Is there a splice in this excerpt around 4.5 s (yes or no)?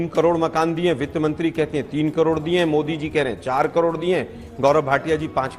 no